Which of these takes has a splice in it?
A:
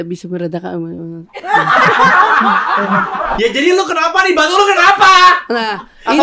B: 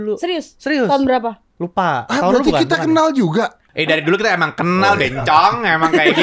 A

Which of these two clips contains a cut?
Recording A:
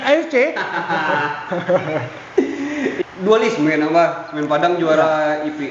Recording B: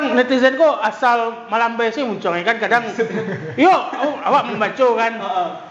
A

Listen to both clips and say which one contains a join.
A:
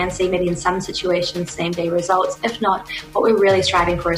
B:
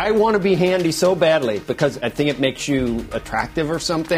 B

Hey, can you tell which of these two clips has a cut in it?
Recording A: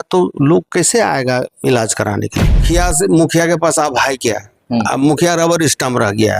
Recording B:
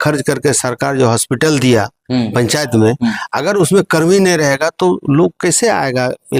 A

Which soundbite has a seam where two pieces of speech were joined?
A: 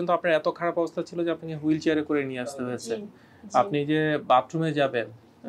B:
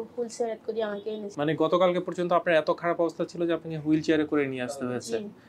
B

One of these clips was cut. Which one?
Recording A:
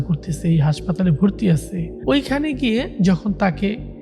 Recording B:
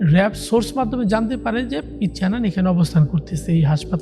A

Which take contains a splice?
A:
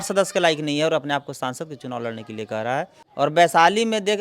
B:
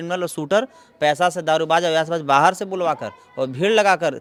A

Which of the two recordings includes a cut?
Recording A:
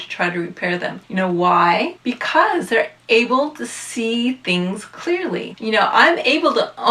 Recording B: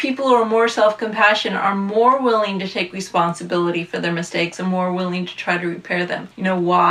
A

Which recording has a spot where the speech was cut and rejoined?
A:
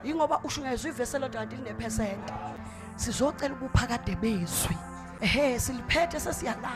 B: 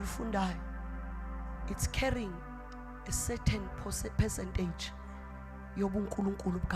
A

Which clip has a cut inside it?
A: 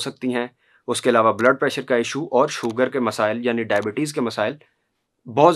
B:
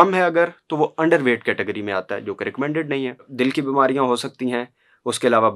B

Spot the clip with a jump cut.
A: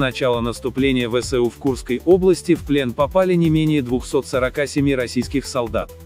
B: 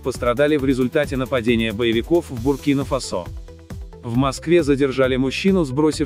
B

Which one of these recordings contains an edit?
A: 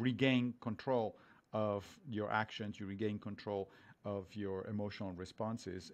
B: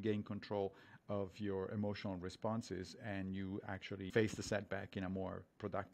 B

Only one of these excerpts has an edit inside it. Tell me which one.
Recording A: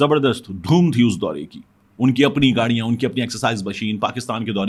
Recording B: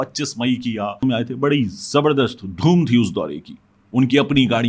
B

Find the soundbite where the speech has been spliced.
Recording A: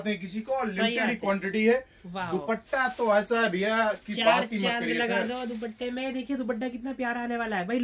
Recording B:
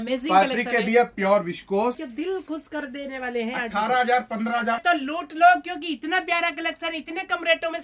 B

